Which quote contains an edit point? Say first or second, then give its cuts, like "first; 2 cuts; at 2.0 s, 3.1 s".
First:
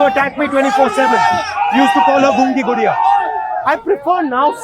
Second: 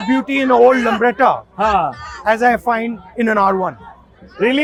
first; 1 cut; at 3.6 s